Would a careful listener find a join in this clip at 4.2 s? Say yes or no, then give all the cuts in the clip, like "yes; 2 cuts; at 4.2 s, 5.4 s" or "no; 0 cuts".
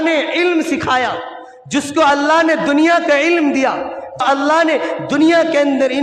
yes; 1 cut; at 4.2 s